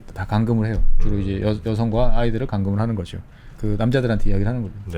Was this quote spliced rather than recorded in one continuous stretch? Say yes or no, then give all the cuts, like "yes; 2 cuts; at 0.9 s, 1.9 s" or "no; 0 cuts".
no; 0 cuts